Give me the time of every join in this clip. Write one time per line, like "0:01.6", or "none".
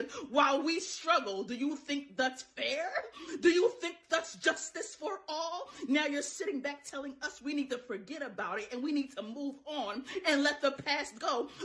0:03.5
0:10.4